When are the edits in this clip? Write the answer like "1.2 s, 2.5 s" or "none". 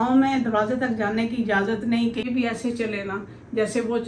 2.3 s